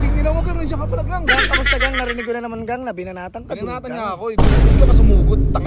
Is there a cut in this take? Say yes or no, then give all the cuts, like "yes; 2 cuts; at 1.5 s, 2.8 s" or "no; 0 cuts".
no; 0 cuts